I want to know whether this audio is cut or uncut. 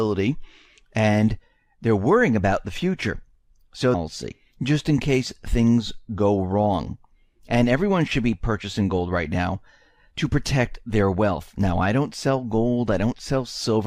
uncut